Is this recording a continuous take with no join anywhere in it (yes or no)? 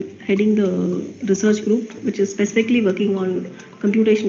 no